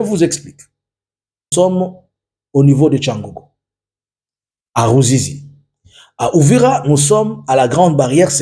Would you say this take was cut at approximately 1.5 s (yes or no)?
yes